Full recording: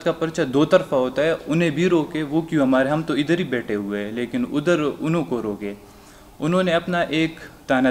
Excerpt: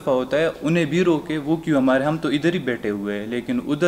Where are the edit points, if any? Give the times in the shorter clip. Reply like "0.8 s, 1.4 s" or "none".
none